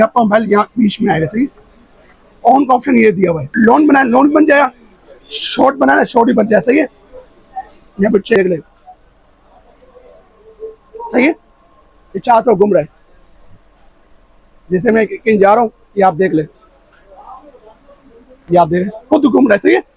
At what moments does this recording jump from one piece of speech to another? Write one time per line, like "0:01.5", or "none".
0:03.4
0:08.4